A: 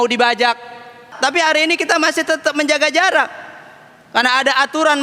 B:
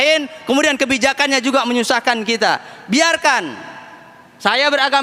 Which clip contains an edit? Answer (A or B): A